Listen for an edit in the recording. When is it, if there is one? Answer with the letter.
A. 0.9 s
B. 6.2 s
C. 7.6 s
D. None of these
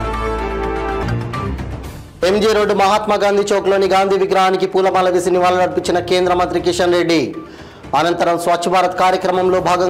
A